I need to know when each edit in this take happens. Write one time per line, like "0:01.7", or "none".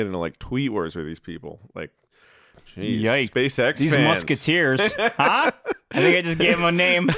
0:02.5
0:03.3